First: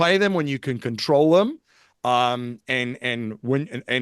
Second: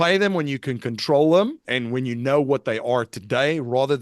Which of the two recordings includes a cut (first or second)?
second